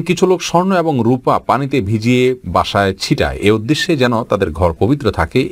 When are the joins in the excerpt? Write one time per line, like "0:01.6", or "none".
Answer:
none